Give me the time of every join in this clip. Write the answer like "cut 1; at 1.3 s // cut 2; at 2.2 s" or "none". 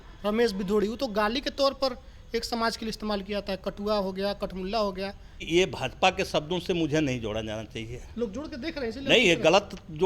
cut 1; at 5.4 s